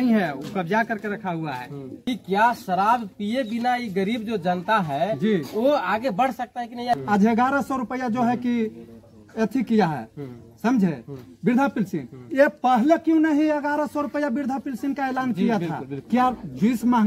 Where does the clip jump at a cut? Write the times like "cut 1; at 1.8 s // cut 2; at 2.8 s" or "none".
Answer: cut 1; at 1.9 s // cut 2; at 7.0 s // cut 3; at 16.1 s